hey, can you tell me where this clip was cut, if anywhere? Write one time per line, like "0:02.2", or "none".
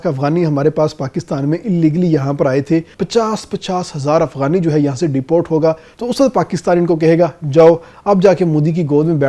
0:03.0
0:05.9